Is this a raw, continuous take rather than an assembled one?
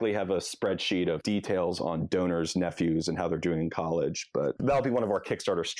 no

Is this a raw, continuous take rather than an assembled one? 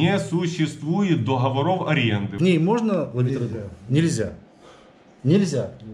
no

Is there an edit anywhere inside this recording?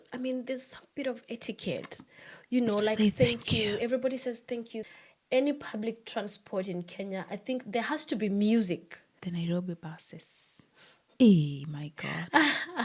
yes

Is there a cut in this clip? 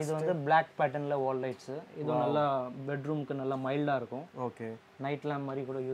no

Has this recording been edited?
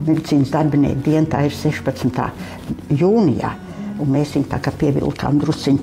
no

